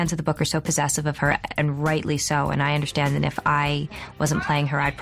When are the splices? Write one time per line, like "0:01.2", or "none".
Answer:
none